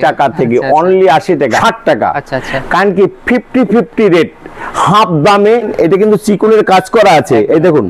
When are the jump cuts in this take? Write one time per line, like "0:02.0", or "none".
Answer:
0:01.6
0:05.7